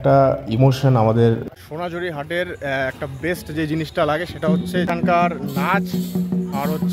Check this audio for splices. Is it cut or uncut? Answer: cut